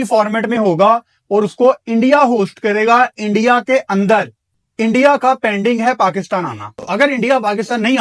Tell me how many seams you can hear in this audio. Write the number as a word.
one